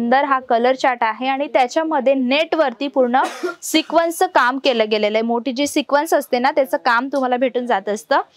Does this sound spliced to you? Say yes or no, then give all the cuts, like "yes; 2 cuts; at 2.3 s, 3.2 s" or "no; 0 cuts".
no; 0 cuts